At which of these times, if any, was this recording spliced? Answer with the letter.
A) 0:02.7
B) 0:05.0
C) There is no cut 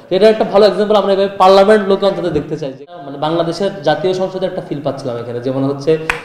A